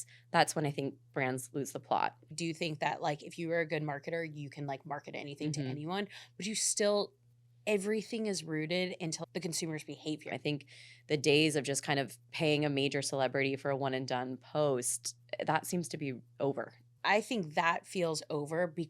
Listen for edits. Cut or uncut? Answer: cut